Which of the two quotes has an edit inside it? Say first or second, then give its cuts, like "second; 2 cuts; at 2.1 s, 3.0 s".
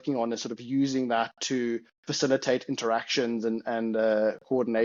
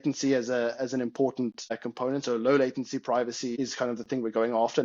second; 2 cuts; at 1.8 s, 3.5 s